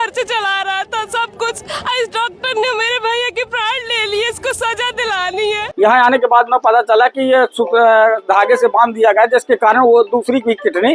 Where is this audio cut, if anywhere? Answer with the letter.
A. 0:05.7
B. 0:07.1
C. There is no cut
A